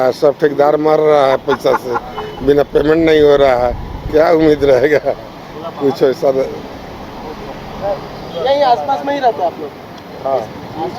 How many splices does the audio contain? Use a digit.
0